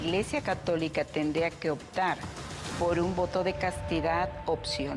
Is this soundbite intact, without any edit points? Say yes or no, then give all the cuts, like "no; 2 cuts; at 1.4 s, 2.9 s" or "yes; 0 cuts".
yes; 0 cuts